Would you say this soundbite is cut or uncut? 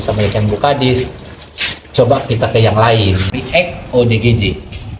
cut